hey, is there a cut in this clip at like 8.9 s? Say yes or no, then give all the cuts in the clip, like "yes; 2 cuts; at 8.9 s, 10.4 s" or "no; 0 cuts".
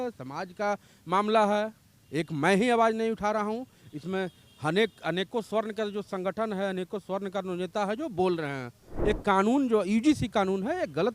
yes; 1 cut; at 8.9 s